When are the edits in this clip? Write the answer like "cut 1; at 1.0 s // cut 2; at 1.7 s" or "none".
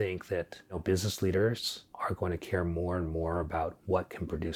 cut 1; at 0.8 s // cut 2; at 1.8 s